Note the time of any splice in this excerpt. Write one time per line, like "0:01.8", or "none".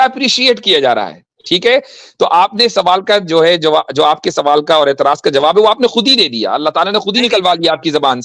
none